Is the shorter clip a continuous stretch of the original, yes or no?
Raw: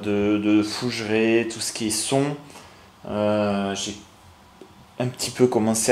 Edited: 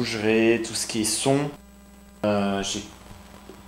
no